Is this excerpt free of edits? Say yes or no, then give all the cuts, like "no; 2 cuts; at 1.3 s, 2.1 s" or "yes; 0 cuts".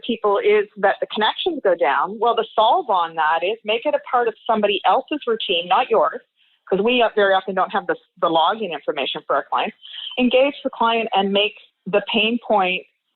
yes; 0 cuts